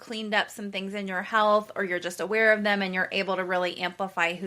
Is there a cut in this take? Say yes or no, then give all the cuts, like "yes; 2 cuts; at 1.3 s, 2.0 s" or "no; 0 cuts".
no; 0 cuts